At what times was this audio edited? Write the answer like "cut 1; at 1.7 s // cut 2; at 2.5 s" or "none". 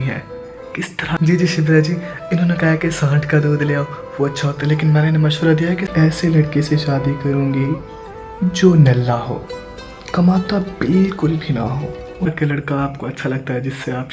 cut 1; at 1.1 s // cut 2; at 5.9 s // cut 3; at 12.3 s